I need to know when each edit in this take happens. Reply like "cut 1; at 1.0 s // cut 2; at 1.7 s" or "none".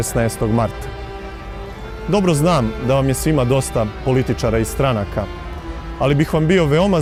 none